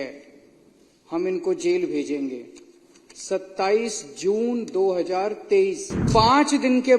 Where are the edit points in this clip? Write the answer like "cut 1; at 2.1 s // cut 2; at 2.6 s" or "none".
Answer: cut 1; at 6.1 s